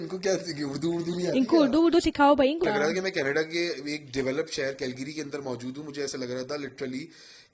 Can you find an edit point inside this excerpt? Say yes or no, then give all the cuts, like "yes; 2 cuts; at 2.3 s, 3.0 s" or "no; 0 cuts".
yes; 1 cut; at 2.6 s